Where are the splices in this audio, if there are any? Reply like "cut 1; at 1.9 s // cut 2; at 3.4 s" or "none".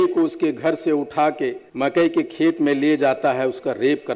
cut 1; at 1.6 s